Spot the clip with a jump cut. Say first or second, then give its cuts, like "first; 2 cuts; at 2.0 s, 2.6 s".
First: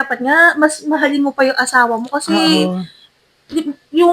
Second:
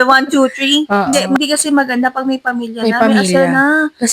second; 1 cut; at 1.3 s